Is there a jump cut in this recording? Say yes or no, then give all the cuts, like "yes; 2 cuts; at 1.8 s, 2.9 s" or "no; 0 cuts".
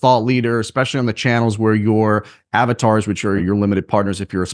yes; 1 cut; at 3.4 s